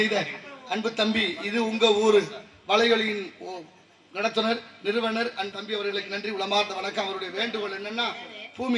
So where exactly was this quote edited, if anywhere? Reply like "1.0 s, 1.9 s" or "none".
5.5 s